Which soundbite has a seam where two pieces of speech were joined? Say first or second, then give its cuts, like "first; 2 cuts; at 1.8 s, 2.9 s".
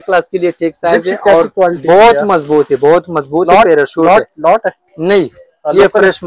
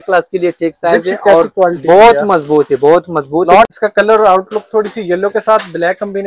second; 1 cut; at 3.6 s